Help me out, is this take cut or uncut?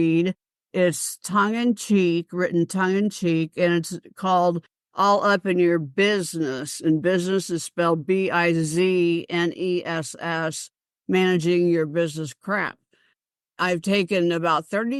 uncut